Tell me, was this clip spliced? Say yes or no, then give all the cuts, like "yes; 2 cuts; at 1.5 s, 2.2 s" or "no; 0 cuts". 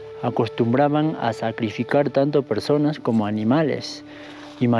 no; 0 cuts